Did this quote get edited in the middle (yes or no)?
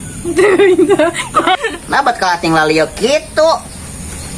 no